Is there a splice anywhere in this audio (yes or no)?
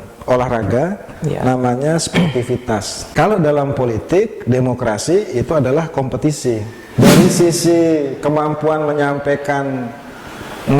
yes